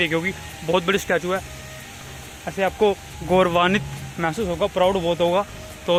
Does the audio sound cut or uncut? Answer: uncut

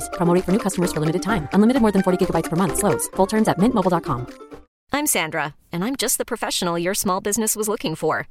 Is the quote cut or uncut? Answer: uncut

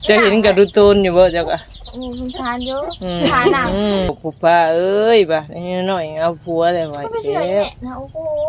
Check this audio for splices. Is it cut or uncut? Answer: cut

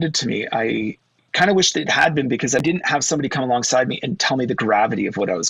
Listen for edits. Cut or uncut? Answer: cut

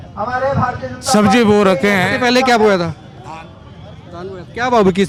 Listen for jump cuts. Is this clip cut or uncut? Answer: uncut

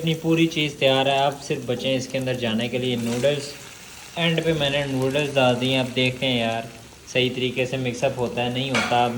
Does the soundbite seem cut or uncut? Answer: uncut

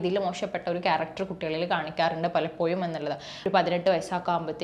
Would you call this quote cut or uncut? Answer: cut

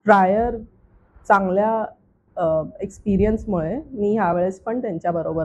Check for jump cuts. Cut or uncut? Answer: uncut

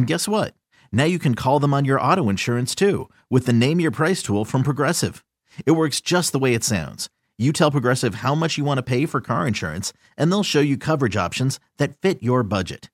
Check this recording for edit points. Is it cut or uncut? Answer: uncut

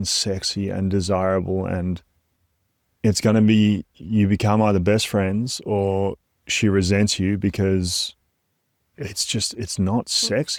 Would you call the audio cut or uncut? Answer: uncut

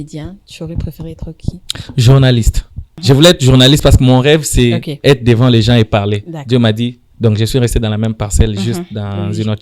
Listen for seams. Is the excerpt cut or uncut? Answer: cut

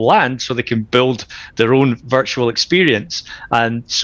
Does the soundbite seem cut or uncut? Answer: uncut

